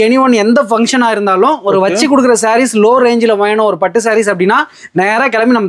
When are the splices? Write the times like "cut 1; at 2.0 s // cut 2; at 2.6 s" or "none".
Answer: none